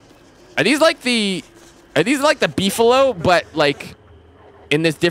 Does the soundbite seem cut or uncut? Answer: uncut